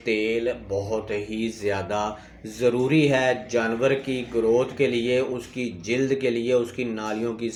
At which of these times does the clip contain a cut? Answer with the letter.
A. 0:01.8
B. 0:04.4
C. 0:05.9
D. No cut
D